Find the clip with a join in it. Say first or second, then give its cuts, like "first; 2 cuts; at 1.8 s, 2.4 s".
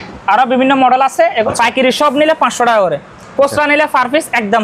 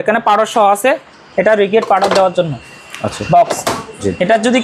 first; 1 cut; at 1.5 s